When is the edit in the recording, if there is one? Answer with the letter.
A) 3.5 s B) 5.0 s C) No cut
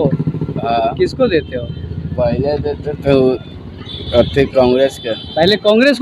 C